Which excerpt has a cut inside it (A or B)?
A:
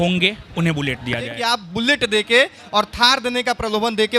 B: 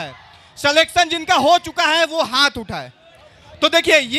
A